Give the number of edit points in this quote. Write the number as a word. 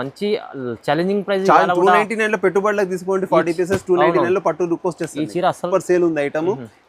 one